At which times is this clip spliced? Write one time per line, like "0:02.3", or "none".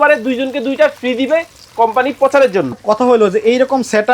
0:02.7

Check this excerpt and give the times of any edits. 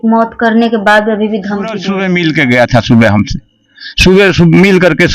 0:01.9

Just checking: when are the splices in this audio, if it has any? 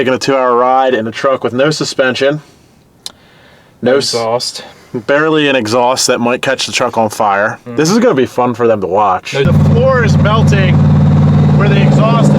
0:09.5

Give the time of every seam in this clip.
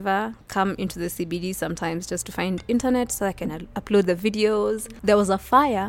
0:04.9

